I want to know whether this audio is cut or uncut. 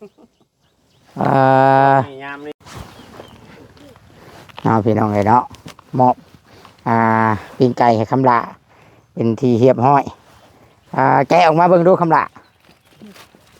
cut